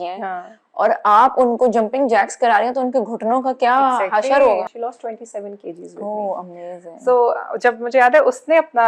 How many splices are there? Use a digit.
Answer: 1